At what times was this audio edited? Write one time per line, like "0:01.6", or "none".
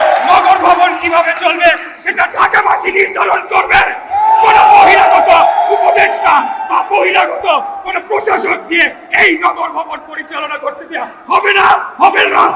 none